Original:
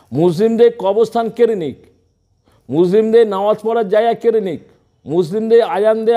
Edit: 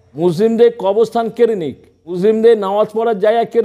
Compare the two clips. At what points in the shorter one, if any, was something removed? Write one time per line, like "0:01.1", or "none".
0:02.2